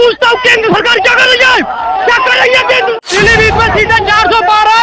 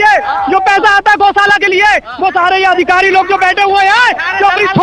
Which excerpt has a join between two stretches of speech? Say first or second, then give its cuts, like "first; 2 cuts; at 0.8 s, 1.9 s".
first; 1 cut; at 3.0 s